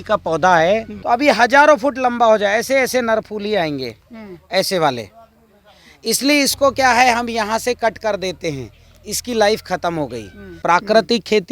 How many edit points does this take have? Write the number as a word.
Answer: two